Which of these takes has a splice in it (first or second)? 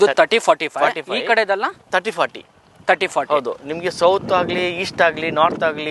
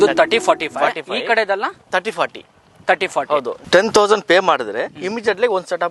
second